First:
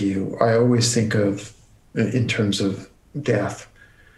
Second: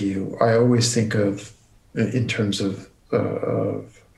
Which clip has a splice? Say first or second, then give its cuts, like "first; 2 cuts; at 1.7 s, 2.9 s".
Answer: first; 1 cut; at 2.9 s